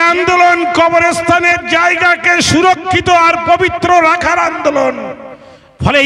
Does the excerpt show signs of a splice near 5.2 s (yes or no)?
no